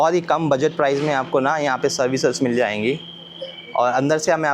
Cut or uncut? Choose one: uncut